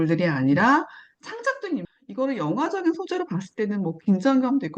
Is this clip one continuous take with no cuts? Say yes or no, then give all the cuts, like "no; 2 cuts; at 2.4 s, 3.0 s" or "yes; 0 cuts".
no; 1 cut; at 1.9 s